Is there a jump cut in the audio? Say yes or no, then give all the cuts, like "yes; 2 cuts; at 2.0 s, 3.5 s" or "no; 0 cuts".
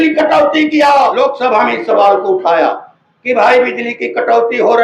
yes; 1 cut; at 1.1 s